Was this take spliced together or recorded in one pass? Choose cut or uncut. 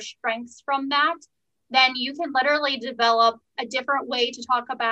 uncut